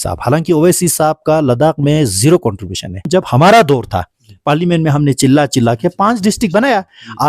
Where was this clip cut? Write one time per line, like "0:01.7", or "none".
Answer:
0:03.0